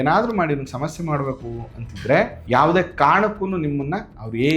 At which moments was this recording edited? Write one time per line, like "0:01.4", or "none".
0:02.4